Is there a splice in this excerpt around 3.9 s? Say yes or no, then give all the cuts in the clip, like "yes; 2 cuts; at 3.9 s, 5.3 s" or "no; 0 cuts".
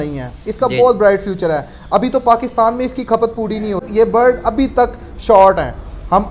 yes; 1 cut; at 3.9 s